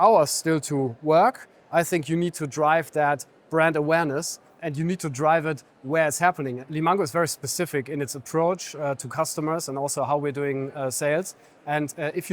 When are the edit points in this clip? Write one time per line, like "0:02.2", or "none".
0:04.6
0:06.6